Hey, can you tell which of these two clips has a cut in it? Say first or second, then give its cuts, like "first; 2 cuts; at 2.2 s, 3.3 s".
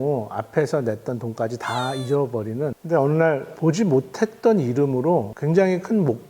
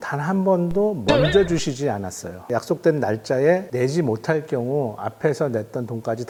first; 3 cuts; at 2.7 s, 3.6 s, 5.3 s